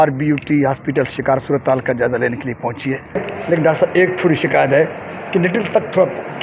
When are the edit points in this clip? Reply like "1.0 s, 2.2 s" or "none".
1.4 s, 3.3 s